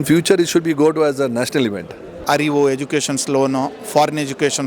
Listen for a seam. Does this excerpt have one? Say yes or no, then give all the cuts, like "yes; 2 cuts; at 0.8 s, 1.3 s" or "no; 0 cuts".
yes; 1 cut; at 2.1 s